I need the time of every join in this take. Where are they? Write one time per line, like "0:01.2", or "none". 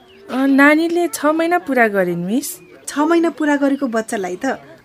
0:02.8